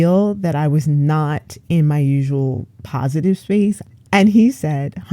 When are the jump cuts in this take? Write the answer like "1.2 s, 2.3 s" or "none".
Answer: 3.9 s